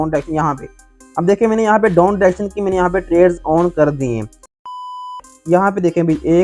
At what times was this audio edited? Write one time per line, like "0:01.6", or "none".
0:04.8